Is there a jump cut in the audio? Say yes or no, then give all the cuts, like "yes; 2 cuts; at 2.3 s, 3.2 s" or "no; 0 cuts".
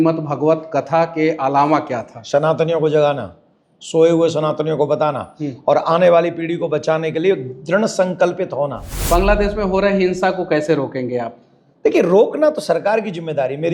yes; 1 cut; at 9.0 s